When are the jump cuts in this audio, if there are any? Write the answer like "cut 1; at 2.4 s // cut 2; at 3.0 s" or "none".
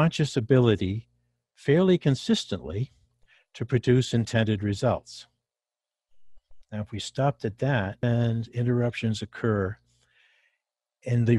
cut 1; at 8.0 s